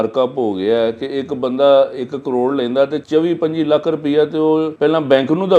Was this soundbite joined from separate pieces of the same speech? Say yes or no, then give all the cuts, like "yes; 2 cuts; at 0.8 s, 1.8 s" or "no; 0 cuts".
yes; 2 cuts; at 3.0 s, 4.7 s